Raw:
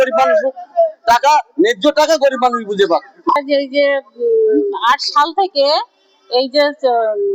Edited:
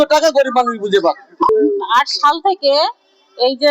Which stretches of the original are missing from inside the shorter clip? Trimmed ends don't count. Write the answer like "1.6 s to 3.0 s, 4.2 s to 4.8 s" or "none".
3.4 s to 4.4 s

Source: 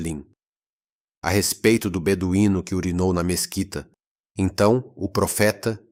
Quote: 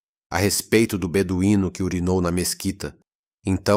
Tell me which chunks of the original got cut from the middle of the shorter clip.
none

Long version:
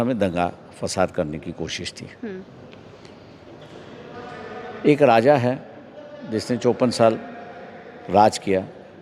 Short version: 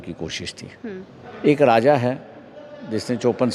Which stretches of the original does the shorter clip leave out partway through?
2.7 s to 4.7 s

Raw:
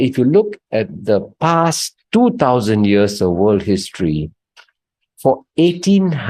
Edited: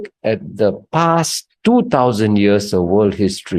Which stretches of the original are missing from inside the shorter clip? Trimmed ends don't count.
none

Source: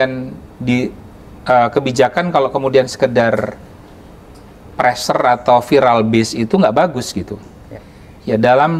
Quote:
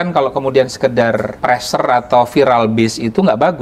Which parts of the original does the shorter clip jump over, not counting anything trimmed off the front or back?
3.5 s to 4.7 s

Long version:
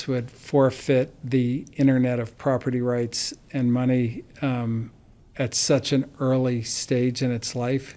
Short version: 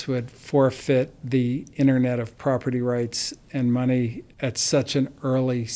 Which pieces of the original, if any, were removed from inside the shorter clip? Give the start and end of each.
4.2 s to 5.2 s

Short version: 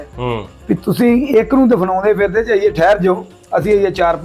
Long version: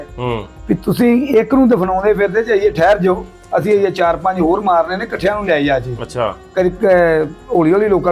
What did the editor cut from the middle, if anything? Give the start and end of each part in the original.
none

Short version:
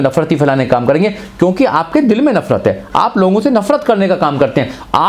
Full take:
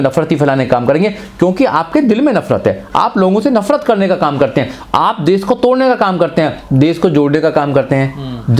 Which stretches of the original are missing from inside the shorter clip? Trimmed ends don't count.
none

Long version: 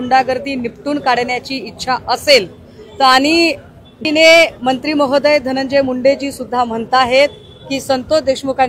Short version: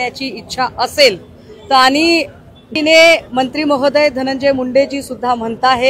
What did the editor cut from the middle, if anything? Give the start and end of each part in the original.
none

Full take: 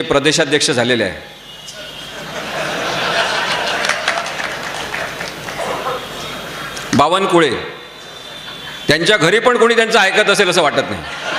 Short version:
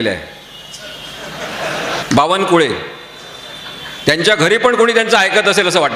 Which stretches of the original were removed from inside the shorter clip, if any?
3.0 s to 6.8 s

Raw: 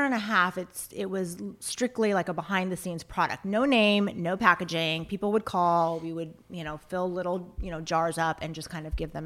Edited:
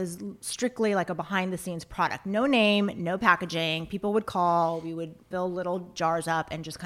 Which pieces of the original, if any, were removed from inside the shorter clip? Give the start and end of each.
6.4 s to 6.8 s, 7.5 s to 7.8 s

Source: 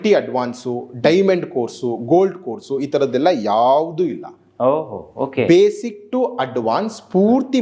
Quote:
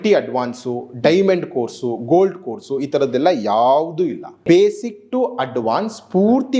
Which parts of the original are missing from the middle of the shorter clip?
4.4 s to 5.4 s

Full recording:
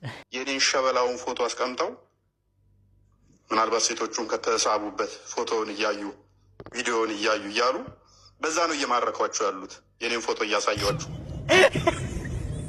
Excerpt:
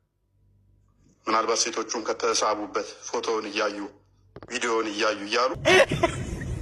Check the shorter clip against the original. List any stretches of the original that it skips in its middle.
7.8 s to 11.4 s

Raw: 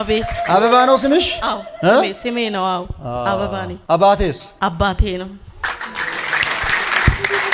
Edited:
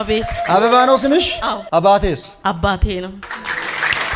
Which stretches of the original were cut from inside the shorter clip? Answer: 1.6 s to 3.8 s, 5.5 s to 5.8 s

